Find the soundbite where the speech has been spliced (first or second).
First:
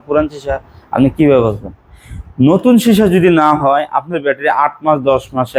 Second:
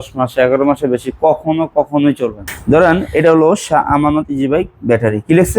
second